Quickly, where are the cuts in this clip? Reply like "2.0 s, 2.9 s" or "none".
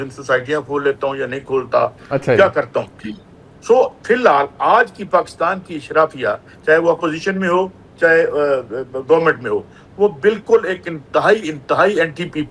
none

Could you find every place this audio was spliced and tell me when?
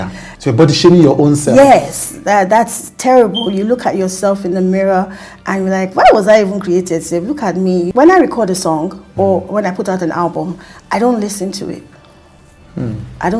7.9 s

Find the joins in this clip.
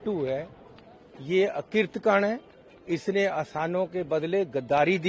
none

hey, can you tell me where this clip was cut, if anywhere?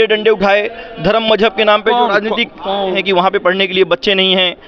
3.0 s

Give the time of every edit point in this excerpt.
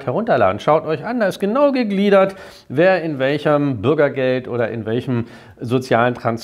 none

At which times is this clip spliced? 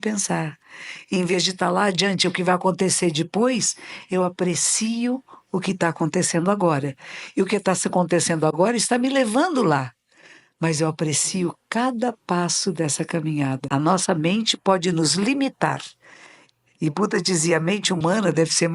13.6 s

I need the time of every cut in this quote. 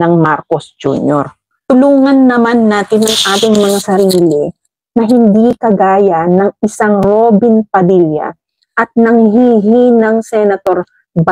1.5 s

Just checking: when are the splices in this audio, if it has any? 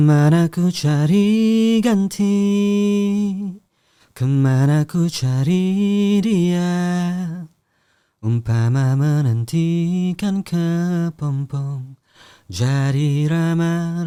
none

